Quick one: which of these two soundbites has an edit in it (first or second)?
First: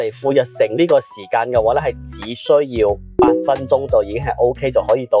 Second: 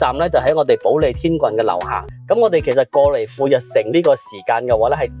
second